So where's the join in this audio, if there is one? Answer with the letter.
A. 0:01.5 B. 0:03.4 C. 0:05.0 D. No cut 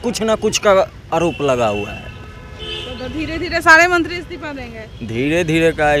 D